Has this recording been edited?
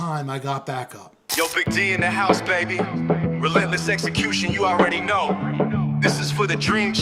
yes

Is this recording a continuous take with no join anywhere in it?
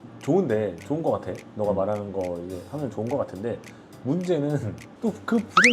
no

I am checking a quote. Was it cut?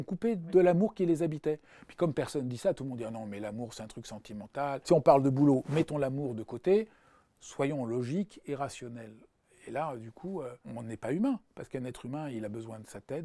yes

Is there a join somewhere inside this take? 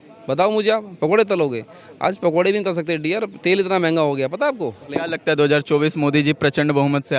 yes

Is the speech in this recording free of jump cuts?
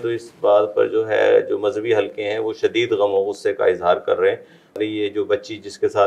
no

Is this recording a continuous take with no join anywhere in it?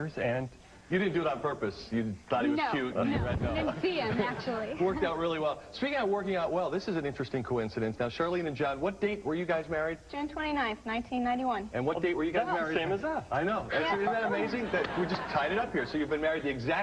no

